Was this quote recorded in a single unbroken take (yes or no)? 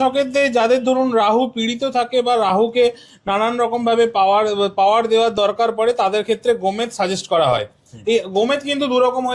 yes